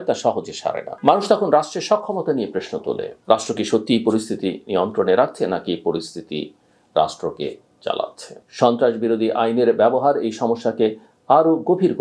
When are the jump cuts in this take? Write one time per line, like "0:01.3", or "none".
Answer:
0:08.3